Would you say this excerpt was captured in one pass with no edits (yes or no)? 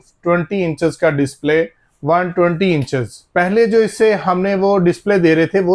no